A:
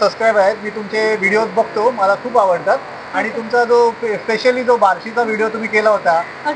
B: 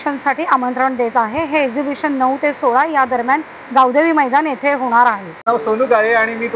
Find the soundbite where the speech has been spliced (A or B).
B